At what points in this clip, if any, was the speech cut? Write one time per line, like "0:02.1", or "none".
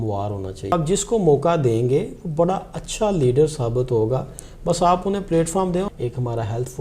0:00.7
0:05.9